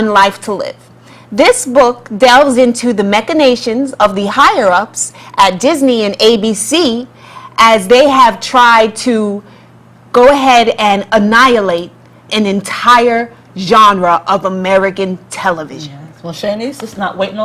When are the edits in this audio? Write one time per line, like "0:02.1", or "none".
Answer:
0:13.1